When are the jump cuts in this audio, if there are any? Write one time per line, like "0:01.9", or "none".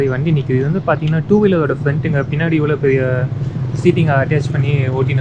none